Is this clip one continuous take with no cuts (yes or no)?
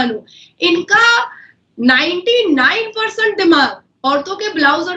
yes